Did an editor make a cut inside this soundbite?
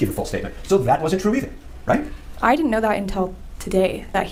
no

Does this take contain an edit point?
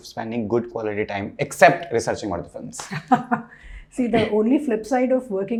no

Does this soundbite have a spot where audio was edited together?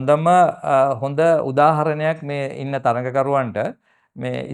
no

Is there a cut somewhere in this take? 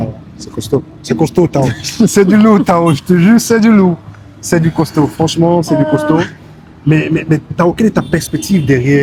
no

